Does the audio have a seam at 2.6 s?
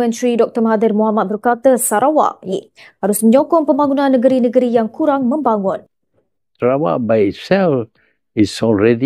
yes; 1 cut; at 2.6 s

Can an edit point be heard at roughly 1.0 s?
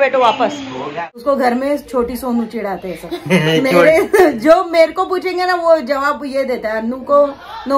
yes; 1 cut; at 1.0 s

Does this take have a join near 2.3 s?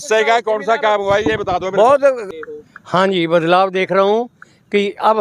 yes; 1 cut; at 2.3 s

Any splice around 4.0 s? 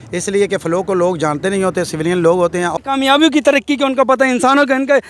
no; 1 cut; at 2.7 s

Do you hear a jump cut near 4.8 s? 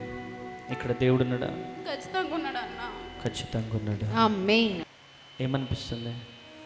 yes; 1 cut; at 4.8 s

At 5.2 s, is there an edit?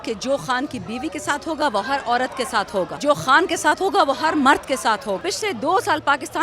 yes; 2 cuts; at 2.9 s, 5.2 s

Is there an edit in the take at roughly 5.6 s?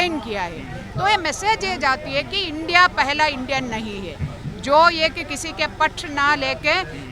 no; 0 cuts

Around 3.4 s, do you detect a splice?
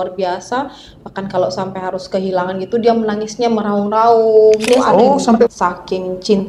no; 1 cut; at 5.5 s

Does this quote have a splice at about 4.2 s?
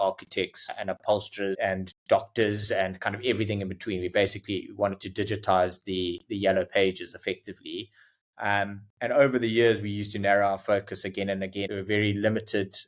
no; 2 cuts; at 1.6 s, 11.6 s

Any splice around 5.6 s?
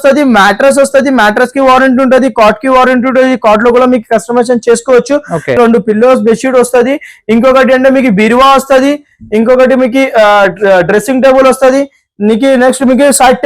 yes; 1 cut; at 5.6 s

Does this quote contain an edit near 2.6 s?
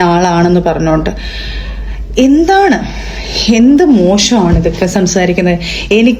no; 0 cuts

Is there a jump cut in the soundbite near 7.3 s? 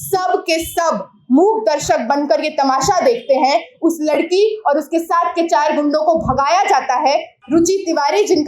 yes; 1 cut; at 7.3 s

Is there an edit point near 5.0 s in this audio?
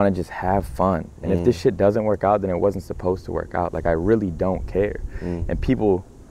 no; 0 cuts

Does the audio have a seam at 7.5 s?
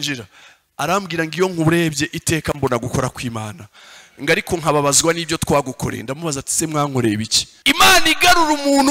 yes; 1 cut; at 7.5 s

